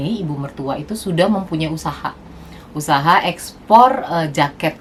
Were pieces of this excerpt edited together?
no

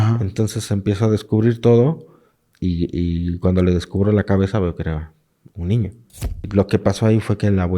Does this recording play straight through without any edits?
no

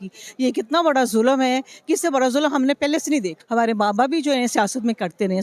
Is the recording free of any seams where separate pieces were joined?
no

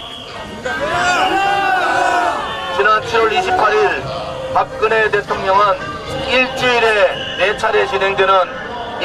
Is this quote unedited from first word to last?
yes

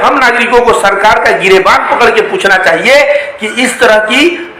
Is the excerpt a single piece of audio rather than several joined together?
yes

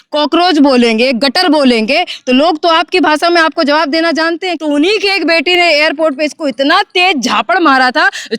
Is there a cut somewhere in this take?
yes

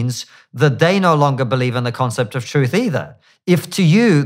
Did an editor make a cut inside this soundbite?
no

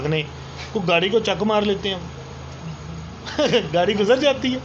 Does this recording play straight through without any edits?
yes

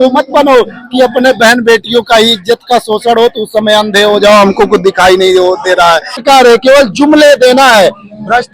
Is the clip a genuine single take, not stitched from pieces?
no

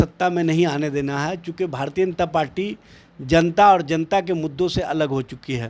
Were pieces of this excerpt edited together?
no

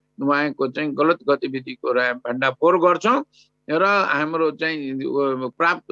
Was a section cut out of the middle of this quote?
no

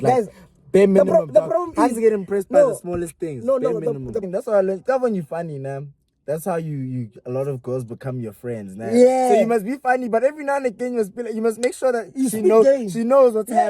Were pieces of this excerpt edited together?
yes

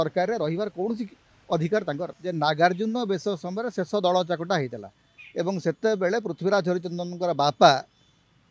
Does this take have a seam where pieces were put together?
yes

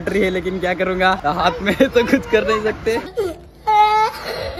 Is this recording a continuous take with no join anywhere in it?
no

